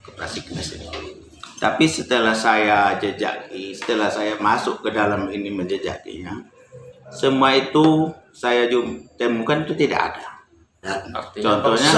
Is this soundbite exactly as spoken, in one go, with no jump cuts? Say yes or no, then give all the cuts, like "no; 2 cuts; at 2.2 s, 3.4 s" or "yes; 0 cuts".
yes; 0 cuts